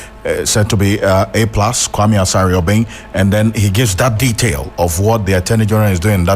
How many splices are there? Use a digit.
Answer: 1